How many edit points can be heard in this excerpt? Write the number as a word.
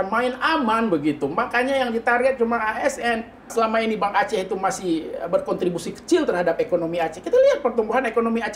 one